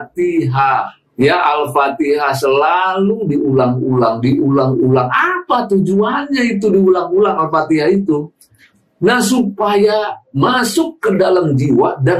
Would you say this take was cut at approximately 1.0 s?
yes; 1 cut; at 1.0 s

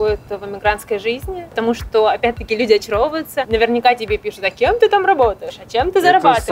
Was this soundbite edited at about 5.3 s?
no; 2 cuts; at 1.5 s, 3.4 s

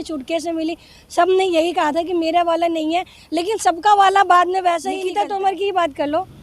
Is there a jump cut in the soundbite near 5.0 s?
yes; 1 cut; at 5.0 s

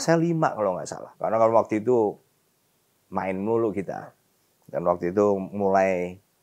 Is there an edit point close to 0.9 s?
yes; 1 cut; at 0.9 s

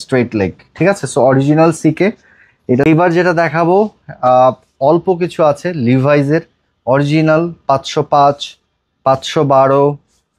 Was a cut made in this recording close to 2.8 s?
yes; 1 cut; at 2.8 s

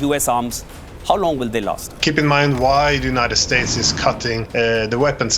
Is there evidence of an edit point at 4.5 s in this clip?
yes; 2 cuts; at 2.0 s, 4.5 s

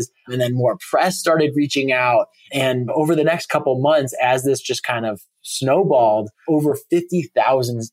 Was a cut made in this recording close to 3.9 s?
no; 2 cuts; at 2.6 s, 6.3 s

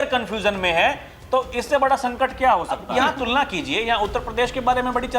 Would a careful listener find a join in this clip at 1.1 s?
no; 1 cut; at 2.8 s

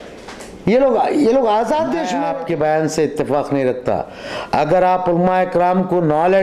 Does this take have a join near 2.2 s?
yes; 1 cut; at 2.2 s

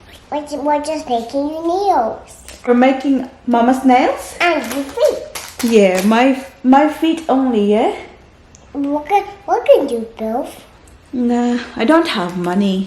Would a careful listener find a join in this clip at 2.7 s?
yes; 1 cut; at 2.7 s

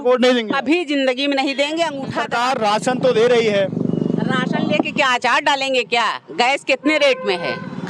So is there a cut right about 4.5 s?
no; 1 cut; at 2.2 s

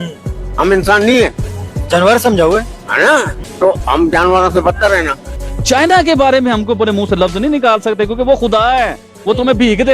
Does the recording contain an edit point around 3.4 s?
yes; 2 cuts; at 3.4 s, 5.3 s

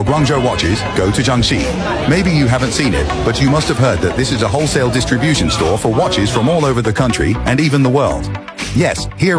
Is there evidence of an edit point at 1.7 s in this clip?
no; 0 cuts

